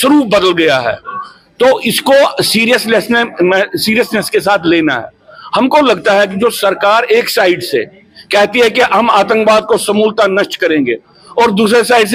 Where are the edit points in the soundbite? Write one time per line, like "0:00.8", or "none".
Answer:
none